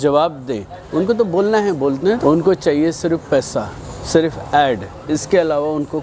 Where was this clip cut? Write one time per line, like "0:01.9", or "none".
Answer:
0:02.2